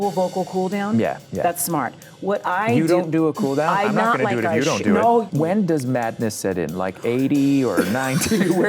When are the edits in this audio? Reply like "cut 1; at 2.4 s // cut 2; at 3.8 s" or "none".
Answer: cut 1; at 1.2 s // cut 2; at 5.3 s